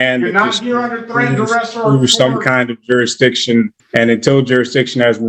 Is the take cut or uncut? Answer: cut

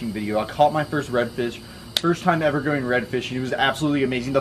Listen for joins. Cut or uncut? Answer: uncut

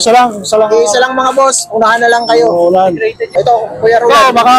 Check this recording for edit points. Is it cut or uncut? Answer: cut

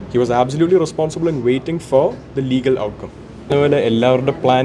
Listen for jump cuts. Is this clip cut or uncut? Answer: cut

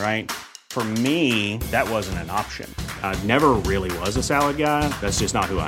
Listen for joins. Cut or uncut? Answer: uncut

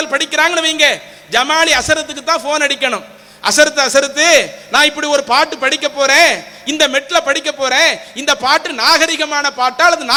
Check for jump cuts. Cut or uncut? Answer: uncut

